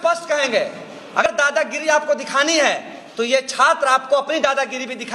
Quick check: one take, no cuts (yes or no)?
no